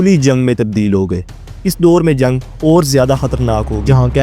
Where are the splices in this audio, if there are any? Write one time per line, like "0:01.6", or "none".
0:01.5